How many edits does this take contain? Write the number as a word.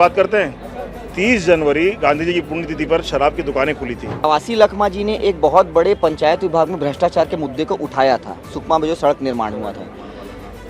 one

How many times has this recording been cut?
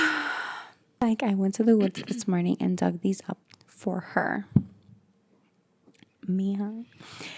one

